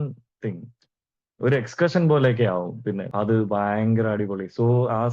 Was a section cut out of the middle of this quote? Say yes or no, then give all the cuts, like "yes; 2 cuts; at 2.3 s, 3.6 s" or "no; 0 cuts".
yes; 1 cut; at 3.0 s